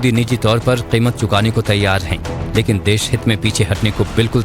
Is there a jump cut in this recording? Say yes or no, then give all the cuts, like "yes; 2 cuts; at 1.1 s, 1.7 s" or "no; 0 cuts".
no; 0 cuts